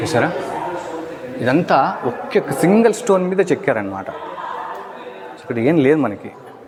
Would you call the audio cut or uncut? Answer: uncut